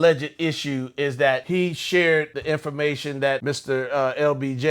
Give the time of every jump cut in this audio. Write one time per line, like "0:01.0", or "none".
0:01.4
0:02.3
0:03.4